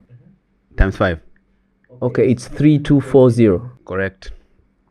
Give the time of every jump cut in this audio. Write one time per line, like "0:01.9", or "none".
0:03.7